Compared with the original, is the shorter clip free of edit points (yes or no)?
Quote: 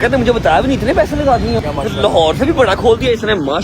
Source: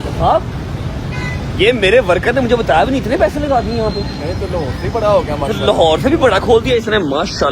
no